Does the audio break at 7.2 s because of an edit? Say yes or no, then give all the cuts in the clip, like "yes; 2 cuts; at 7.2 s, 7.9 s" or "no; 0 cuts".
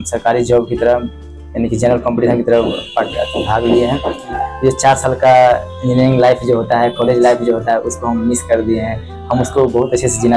no; 1 cut; at 4.4 s